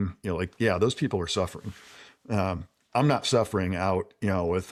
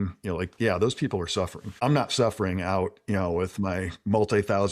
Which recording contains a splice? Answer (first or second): second